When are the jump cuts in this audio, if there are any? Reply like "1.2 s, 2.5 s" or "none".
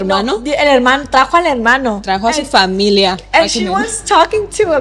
none